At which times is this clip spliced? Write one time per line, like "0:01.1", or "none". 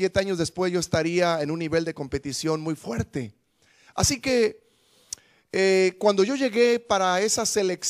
0:01.1